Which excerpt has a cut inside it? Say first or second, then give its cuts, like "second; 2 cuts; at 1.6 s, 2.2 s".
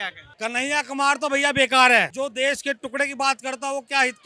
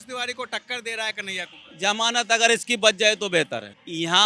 first; 1 cut; at 2.1 s